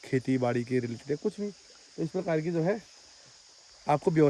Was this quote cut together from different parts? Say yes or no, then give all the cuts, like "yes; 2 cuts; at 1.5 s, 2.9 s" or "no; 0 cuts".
no; 0 cuts